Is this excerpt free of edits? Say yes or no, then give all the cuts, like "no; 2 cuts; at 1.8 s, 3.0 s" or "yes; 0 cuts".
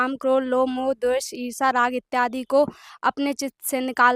yes; 0 cuts